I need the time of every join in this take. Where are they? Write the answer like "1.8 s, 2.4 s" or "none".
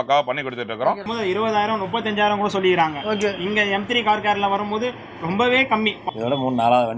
1.1 s, 6.0 s